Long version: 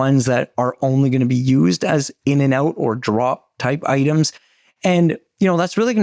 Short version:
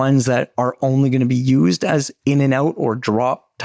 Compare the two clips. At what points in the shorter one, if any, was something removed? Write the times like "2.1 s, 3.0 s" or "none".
none